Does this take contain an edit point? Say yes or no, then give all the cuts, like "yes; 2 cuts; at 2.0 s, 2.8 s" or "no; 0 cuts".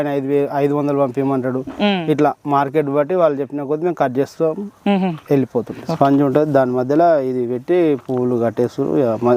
yes; 1 cut; at 5.8 s